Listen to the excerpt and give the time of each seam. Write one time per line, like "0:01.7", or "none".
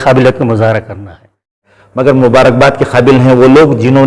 0:01.7

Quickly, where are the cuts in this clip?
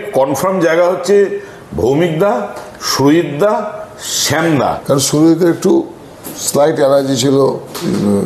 0:04.8

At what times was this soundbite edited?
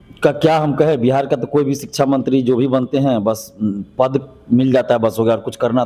none

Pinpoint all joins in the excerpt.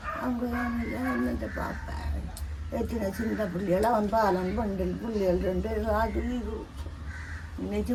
none

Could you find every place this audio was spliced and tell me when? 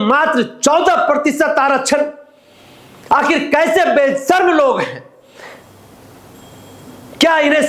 none

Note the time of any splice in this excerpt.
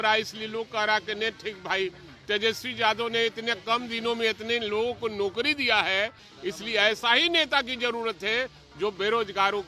0:06.3

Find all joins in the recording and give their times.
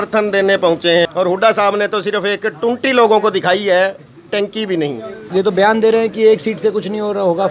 0:01.1
0:05.2

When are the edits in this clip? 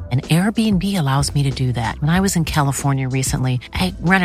none

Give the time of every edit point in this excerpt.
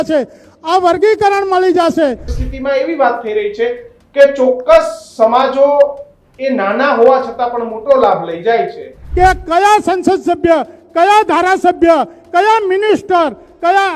0:02.3
0:09.0

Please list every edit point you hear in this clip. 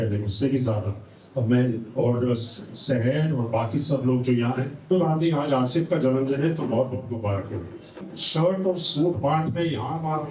0:04.9
0:08.1

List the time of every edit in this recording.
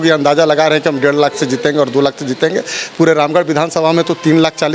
none

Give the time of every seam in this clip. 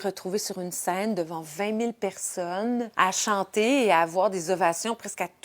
0:02.9

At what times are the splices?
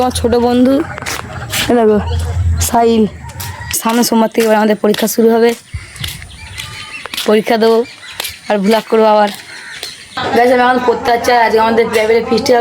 0:03.8
0:10.1

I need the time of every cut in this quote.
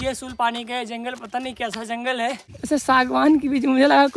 0:02.5

